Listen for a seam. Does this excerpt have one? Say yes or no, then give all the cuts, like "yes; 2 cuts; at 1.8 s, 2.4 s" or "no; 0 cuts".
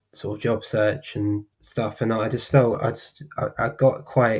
yes; 1 cut; at 1.6 s